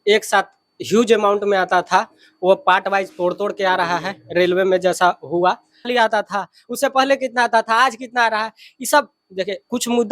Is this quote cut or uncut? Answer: cut